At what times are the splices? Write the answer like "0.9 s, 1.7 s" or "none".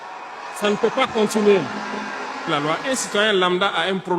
2.5 s